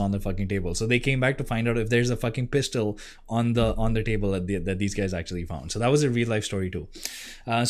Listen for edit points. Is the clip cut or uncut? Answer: uncut